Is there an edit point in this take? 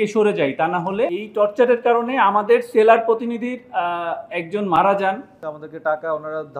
yes; 2 cuts; at 1.1 s, 5.3 s

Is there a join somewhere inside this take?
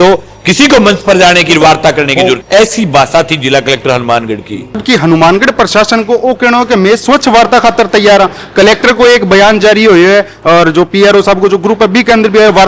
yes; 2 cuts; at 2.4 s, 4.8 s

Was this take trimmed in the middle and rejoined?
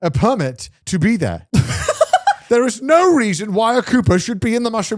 yes; 2 cuts; at 1.4 s, 2.4 s

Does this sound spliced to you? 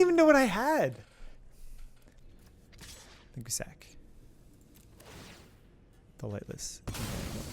yes; 1 cut; at 2.1 s

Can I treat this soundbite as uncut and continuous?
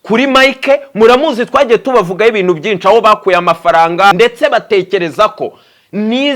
no; 1 cut; at 4.1 s

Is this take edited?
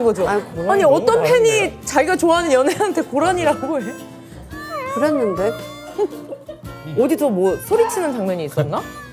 no; 0 cuts

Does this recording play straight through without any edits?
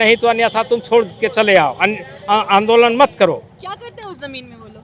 yes; 0 cuts

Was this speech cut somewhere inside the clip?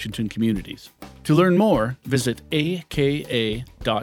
no; 0 cuts

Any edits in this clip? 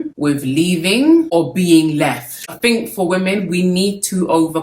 no; 0 cuts

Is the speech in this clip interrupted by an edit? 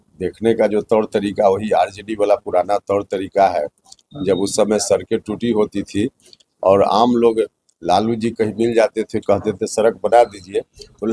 no; 0 cuts

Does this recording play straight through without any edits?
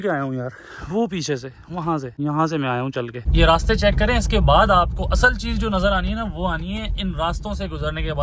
no; 2 cuts; at 2.1 s, 3.2 s

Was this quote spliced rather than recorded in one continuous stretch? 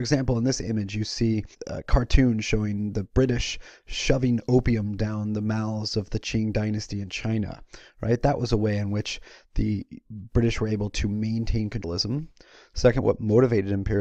no; 0 cuts

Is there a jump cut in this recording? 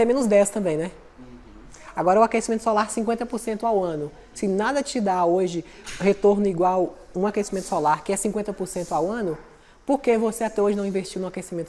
no; 0 cuts

